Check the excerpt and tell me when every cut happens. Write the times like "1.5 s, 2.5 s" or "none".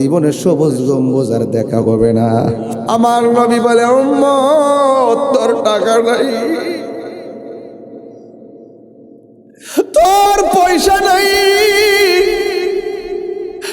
2.8 s